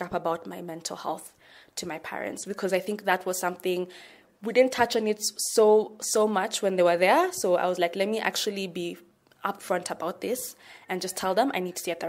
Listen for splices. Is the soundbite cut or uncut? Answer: uncut